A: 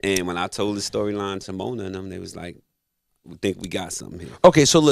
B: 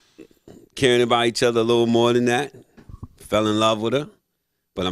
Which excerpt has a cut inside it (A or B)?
B